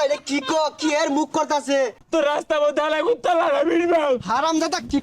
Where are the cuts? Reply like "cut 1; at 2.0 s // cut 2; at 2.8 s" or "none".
cut 1; at 2.0 s